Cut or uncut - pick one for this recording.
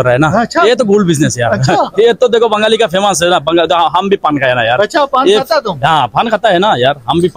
uncut